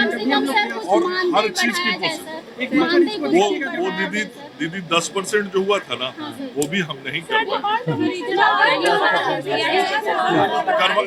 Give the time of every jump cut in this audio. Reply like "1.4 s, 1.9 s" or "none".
none